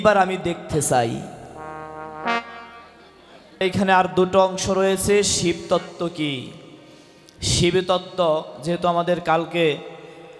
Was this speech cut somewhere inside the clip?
yes; 1 cut; at 3.6 s

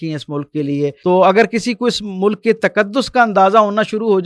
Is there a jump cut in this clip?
yes; 1 cut; at 1.0 s

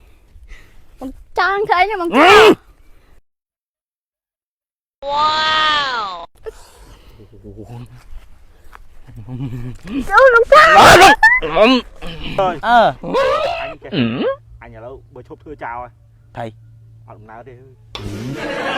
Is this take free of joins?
no; 3 cuts; at 12.4 s, 13.0 s, 14.6 s

